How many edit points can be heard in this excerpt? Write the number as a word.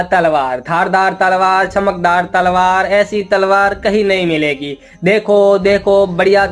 zero